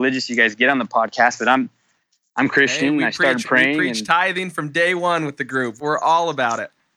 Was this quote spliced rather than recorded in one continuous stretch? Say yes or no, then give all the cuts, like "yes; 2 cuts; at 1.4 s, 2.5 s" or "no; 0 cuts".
no; 0 cuts